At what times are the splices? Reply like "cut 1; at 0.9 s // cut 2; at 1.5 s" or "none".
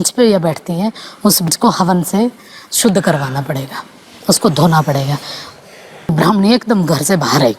cut 1; at 1.5 s // cut 2; at 6.1 s